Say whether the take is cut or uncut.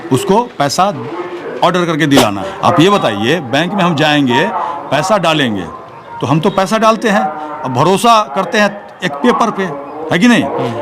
cut